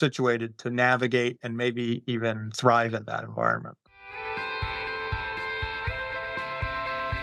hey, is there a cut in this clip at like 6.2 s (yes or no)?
no